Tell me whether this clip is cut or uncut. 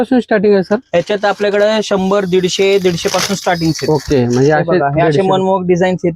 uncut